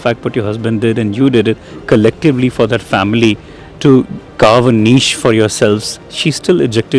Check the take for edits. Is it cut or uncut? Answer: uncut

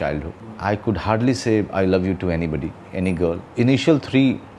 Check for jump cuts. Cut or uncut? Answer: uncut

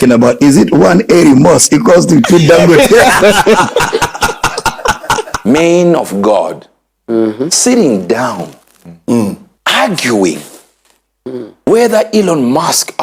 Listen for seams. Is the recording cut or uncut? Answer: cut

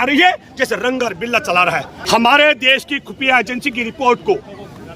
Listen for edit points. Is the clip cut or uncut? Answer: cut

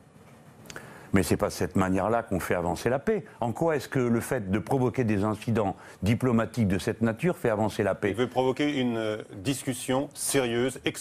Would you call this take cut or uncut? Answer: cut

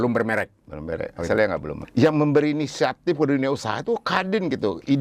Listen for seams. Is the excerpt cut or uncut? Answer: cut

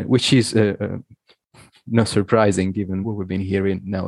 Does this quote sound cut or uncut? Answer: cut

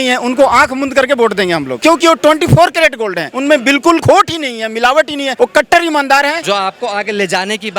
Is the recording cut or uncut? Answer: cut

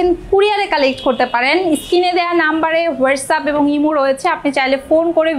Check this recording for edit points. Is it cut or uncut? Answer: uncut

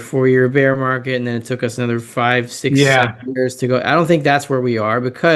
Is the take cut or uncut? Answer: uncut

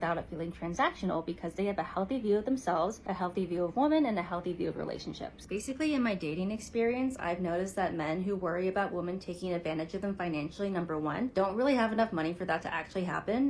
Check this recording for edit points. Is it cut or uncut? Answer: cut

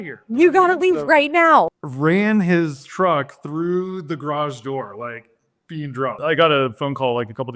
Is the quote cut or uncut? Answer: cut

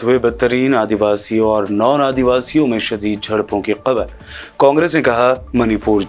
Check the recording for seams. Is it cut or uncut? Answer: uncut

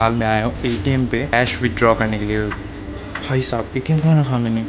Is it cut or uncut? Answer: cut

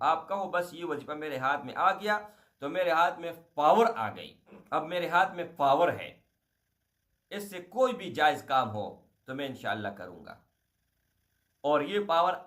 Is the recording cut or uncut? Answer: cut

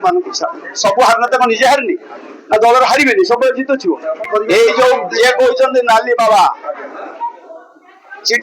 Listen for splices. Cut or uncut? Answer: cut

